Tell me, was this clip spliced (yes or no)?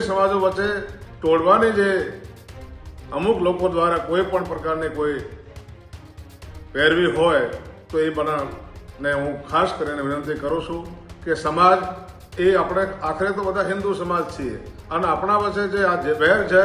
no